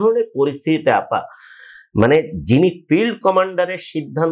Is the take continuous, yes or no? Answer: yes